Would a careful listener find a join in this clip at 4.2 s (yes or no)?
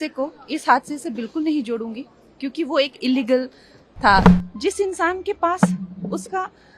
yes